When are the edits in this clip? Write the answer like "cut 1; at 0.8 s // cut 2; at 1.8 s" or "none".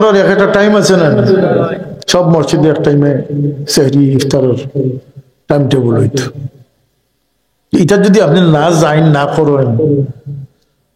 none